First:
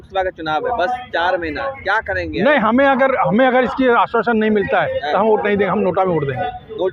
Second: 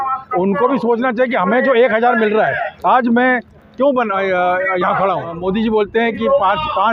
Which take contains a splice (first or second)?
second